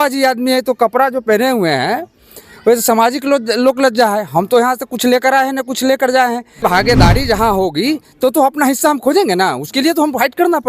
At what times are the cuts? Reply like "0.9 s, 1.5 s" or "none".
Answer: 6.6 s